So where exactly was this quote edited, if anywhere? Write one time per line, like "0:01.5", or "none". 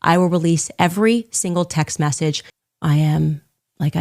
0:02.5